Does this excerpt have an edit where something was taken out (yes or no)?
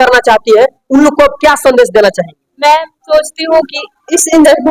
no